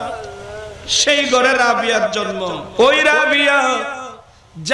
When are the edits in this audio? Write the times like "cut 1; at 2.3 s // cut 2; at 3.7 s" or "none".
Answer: cut 1; at 2.6 s